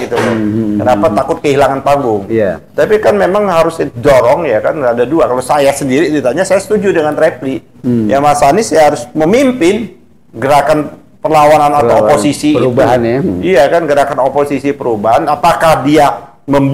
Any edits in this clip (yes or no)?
no